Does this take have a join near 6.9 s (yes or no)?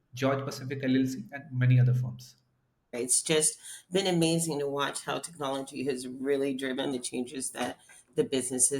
yes